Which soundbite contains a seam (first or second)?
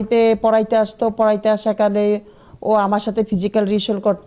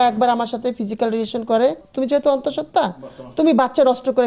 second